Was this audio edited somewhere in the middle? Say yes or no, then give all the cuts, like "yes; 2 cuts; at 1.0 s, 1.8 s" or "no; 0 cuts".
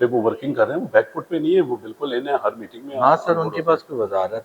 no; 0 cuts